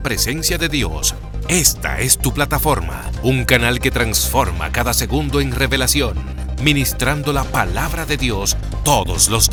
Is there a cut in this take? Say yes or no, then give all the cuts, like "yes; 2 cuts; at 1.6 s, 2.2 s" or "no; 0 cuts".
no; 0 cuts